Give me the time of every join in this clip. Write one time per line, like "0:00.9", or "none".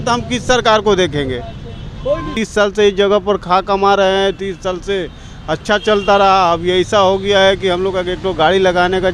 0:02.4